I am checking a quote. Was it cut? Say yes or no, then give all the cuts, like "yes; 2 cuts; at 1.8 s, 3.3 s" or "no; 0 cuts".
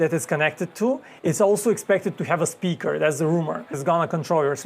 yes; 1 cut; at 3.7 s